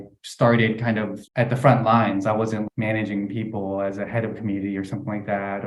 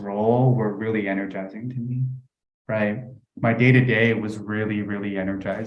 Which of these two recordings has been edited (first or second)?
first